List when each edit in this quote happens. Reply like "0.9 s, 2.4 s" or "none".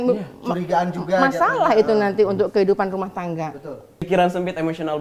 4.1 s

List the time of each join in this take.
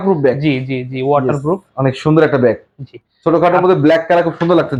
none

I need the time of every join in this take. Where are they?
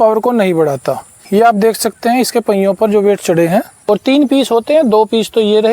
1.1 s, 3.7 s

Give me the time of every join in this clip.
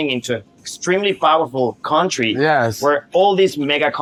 none

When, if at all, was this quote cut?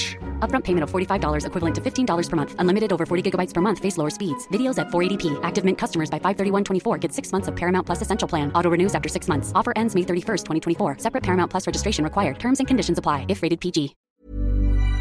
14.0 s

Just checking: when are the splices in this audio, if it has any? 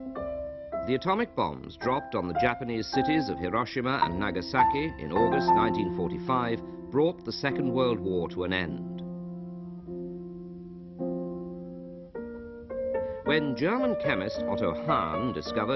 5.0 s

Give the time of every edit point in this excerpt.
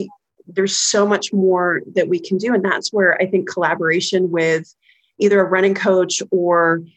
5.2 s

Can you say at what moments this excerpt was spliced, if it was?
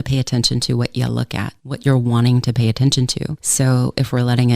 1.6 s

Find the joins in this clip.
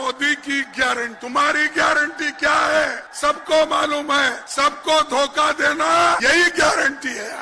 1.2 s, 3.0 s, 4.4 s, 6.2 s

